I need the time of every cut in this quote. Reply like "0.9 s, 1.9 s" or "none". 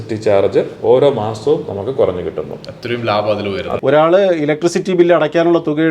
3.7 s